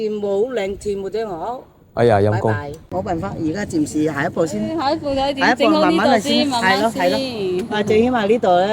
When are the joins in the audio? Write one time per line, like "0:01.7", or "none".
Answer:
0:02.8